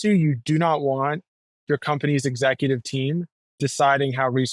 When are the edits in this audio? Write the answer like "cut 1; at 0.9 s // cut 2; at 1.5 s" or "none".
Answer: none